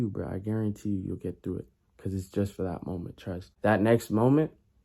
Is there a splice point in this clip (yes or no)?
yes